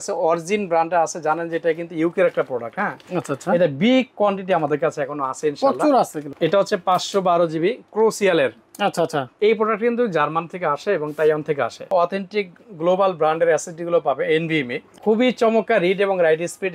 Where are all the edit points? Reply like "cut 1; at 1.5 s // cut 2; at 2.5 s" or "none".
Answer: cut 1; at 6.2 s // cut 2; at 11.8 s // cut 3; at 14.8 s